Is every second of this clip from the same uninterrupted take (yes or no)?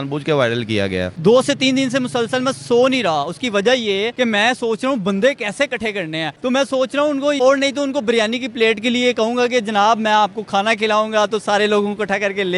no